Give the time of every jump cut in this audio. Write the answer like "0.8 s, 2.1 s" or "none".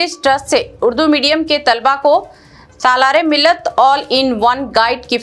none